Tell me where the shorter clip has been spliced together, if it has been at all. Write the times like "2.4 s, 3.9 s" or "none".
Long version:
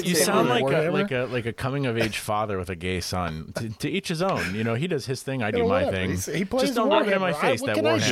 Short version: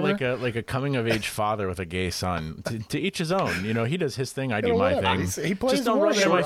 none